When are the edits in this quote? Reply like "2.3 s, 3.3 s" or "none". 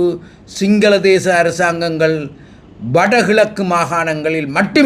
none